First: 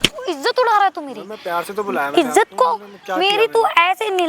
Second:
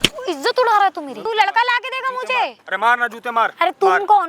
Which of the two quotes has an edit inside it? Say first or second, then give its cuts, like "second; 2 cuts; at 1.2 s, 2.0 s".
second; 1 cut; at 1.1 s